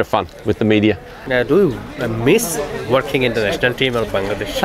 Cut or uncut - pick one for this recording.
cut